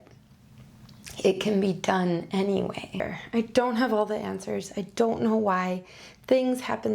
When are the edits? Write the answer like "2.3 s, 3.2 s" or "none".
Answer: 3.0 s